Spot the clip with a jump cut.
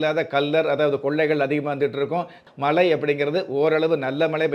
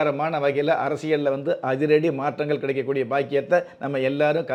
first; 1 cut; at 2.4 s

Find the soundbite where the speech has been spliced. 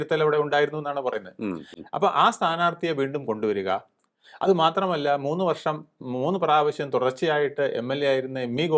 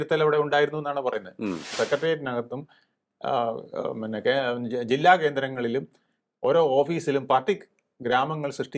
second; 1 cut; at 1.7 s

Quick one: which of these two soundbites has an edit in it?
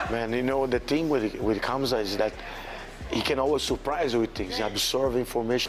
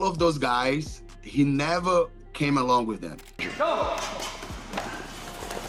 second; 1 cut; at 3.2 s

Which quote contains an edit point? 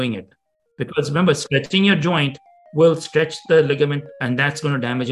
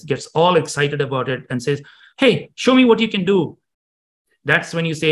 first; 1 cut; at 4.1 s

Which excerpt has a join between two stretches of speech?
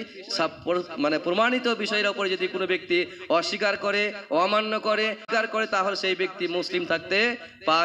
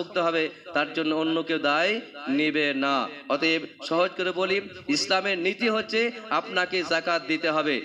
first; 1 cut; at 5.2 s

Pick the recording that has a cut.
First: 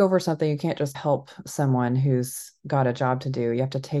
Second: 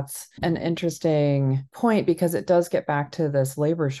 second; 1 cut; at 1.6 s

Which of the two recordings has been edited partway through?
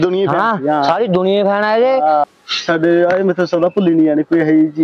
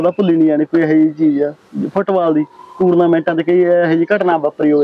first; 1 cut; at 2.2 s

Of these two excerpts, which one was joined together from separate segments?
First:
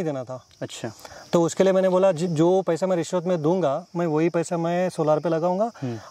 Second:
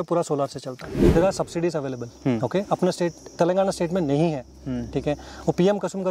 second; 1 cut; at 1.0 s

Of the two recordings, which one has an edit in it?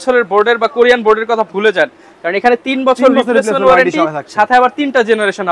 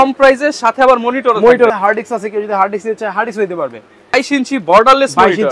second; 2 cuts; at 1.7 s, 4.1 s

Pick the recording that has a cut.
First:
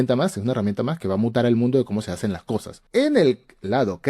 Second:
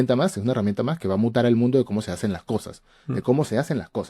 first; 1 cut; at 2.7 s

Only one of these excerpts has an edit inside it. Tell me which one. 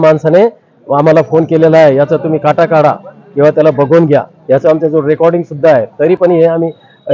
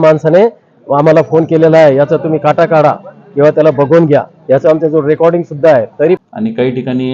second; 1 cut; at 6.2 s

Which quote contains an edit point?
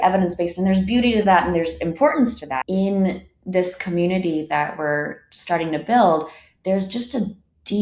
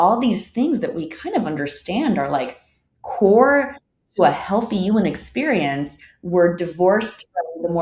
first; 1 cut; at 2.6 s

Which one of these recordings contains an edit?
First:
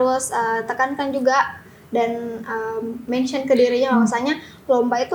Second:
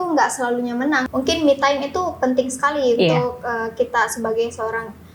second; 1 cut; at 1.0 s

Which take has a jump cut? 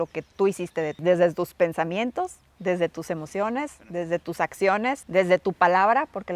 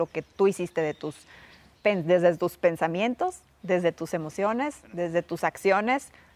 first; 2 cuts; at 1.0 s, 5.0 s

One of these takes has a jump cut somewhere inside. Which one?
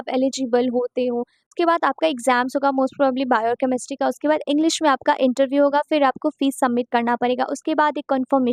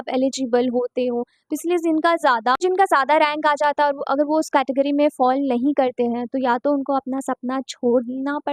first; 1 cut; at 1.5 s

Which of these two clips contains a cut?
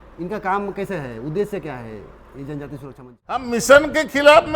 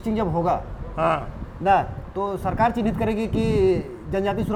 first; 1 cut; at 3.4 s

